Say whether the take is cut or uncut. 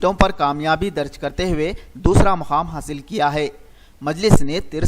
cut